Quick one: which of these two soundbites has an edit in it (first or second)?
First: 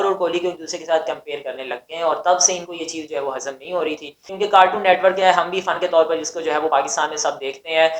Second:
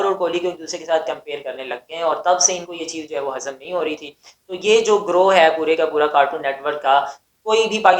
first